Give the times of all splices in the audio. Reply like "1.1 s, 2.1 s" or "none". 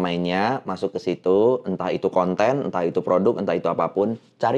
none